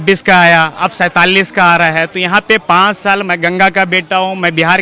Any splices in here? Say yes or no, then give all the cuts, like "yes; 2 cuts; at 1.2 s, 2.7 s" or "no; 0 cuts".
no; 0 cuts